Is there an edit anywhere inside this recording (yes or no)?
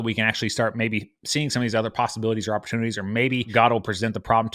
yes